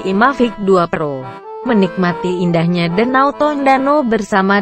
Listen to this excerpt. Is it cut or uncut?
cut